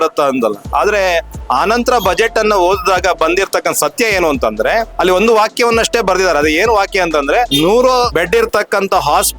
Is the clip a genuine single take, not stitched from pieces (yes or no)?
no